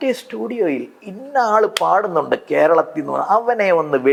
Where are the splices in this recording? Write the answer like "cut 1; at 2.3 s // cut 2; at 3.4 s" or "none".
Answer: none